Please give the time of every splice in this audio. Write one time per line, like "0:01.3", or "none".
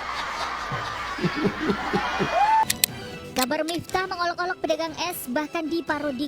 0:02.6